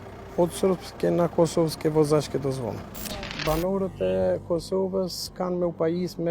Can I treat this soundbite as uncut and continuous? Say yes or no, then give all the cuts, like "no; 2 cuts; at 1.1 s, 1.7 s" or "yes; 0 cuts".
no; 1 cut; at 3.3 s